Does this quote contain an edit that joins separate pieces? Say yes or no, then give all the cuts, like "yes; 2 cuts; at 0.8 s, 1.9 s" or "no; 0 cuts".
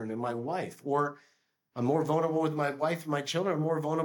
no; 0 cuts